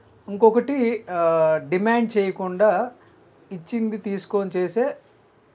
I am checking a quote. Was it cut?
no; 0 cuts

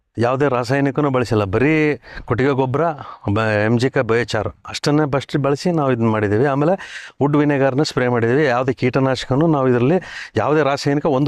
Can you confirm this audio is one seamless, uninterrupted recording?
yes; 0 cuts

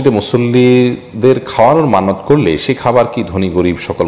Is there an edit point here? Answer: no; 0 cuts

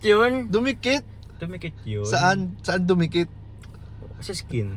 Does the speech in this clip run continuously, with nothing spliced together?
yes; 0 cuts

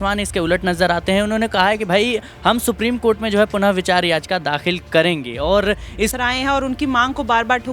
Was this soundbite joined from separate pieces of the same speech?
yes; 1 cut; at 6.1 s

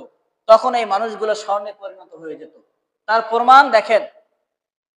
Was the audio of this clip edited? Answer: no; 0 cuts

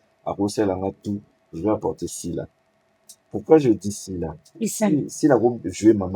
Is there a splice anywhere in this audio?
no; 0 cuts

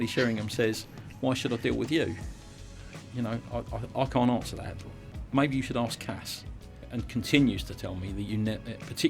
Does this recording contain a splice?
yes; 2 cuts; at 2.8 s, 6.9 s

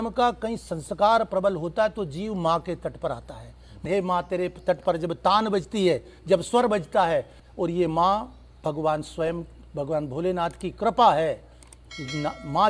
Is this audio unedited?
no; 2 cuts; at 3.8 s, 7.4 s

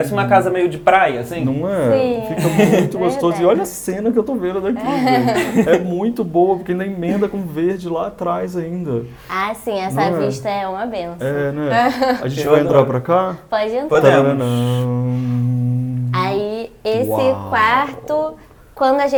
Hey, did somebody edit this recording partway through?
no; 0 cuts

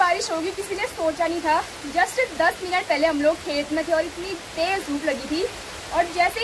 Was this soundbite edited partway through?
no; 0 cuts

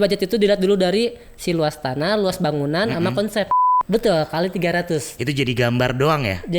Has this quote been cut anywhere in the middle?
yes; 1 cut; at 3.7 s

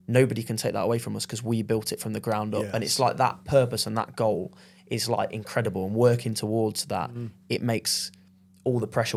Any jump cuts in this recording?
no; 0 cuts

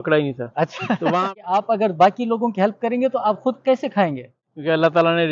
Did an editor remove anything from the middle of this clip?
yes; 2 cuts; at 1.2 s, 4.3 s

